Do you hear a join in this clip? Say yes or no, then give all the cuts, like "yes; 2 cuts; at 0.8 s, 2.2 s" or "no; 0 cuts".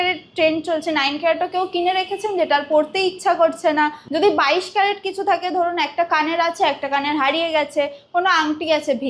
yes; 1 cut; at 4.0 s